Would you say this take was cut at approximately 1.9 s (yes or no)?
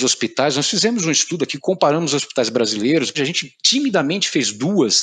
no